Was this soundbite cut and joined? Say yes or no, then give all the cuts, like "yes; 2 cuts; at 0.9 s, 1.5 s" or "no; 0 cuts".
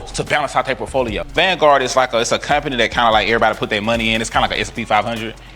yes; 1 cut; at 1.4 s